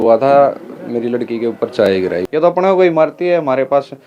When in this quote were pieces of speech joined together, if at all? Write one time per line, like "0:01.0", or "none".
0:02.2

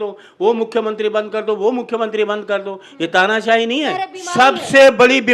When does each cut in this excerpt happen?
0:04.2

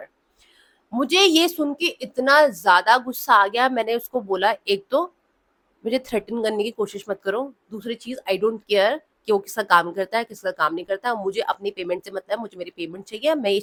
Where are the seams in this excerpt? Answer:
none

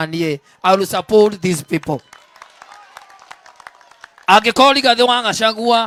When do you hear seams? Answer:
none

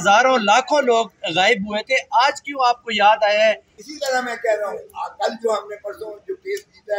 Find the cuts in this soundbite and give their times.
0:03.7

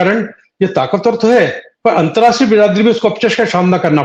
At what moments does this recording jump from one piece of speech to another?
none

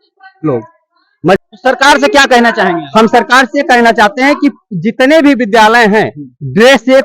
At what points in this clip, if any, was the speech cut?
0:01.4

